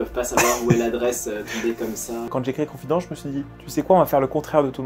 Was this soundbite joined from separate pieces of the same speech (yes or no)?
yes